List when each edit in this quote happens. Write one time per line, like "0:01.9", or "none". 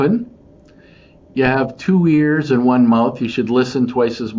none